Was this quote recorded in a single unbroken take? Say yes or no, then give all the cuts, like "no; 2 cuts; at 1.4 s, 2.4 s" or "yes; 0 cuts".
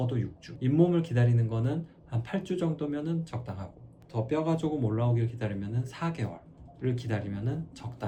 yes; 0 cuts